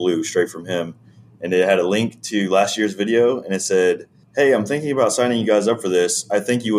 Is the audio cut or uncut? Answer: cut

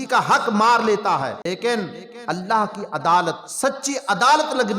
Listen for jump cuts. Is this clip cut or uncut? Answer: cut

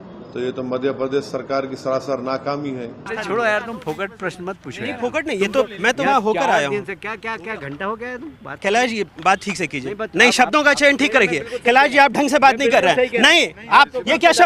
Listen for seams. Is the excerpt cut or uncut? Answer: cut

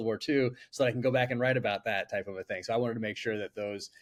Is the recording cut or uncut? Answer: uncut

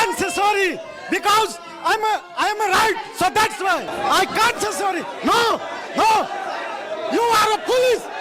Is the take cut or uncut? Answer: cut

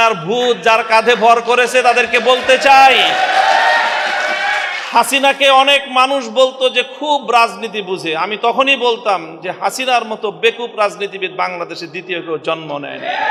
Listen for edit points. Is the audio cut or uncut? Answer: uncut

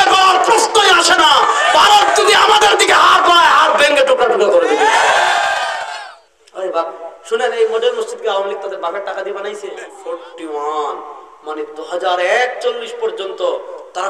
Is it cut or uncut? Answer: cut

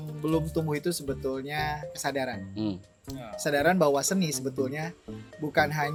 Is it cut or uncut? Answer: uncut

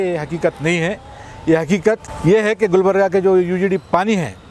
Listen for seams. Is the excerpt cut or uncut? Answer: cut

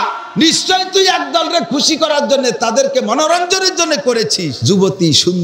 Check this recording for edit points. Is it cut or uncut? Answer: cut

